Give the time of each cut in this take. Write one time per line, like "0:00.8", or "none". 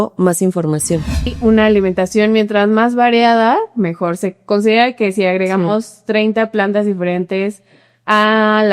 0:01.3